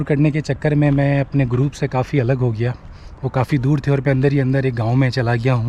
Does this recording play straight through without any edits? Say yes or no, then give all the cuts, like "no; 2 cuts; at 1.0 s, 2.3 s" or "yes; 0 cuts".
yes; 0 cuts